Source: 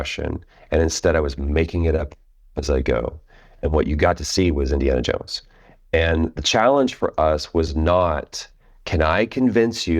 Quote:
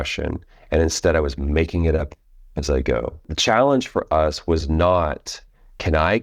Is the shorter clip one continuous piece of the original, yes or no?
no